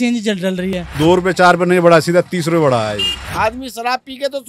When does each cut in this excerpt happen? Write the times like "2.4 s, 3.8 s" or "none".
0.9 s, 3.3 s